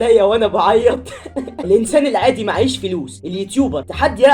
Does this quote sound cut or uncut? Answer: cut